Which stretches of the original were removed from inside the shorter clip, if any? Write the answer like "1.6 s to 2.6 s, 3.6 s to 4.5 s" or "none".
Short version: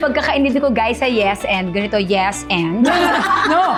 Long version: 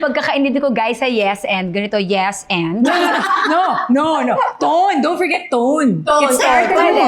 none